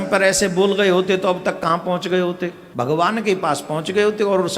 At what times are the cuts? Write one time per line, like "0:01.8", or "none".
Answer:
0:02.6

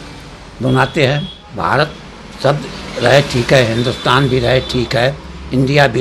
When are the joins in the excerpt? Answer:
0:01.4

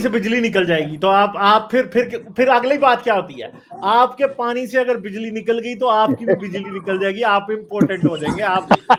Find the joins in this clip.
none

